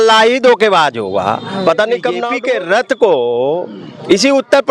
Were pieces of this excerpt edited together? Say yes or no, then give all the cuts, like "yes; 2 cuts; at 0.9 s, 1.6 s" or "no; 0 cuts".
yes; 1 cut; at 2.3 s